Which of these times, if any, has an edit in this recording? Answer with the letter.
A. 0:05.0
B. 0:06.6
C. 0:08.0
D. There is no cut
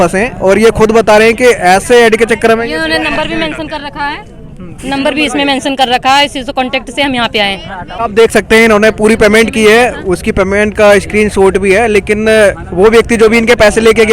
C